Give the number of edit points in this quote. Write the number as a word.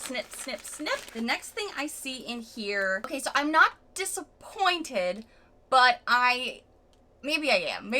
two